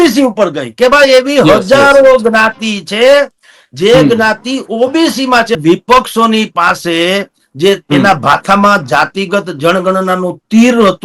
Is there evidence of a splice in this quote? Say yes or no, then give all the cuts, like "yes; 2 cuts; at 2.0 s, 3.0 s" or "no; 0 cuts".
yes; 1 cut; at 5.6 s